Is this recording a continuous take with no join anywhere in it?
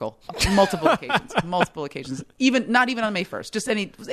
yes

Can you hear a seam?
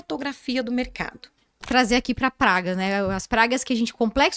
yes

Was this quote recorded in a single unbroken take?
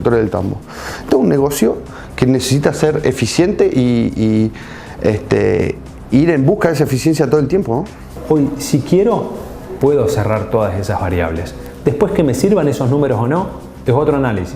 no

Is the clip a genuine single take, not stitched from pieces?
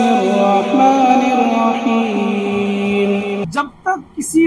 no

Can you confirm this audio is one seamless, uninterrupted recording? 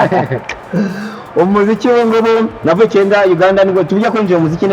yes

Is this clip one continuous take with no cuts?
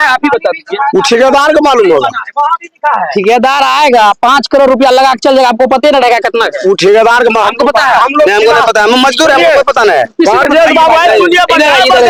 yes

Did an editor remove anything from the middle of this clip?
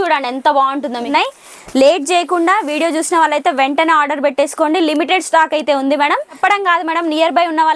yes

